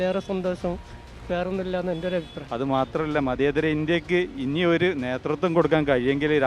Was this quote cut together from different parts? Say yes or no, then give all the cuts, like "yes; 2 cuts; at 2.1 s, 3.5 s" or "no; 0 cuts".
yes; 1 cut; at 2.4 s